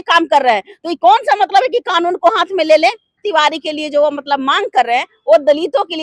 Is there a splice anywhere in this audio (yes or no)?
yes